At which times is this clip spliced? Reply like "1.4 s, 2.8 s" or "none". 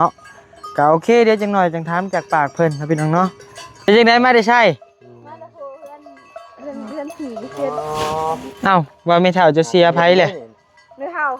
3.9 s